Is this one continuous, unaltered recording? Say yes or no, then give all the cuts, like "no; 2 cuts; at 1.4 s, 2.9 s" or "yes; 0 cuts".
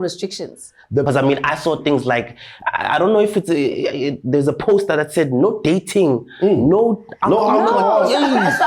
no; 1 cut; at 1.0 s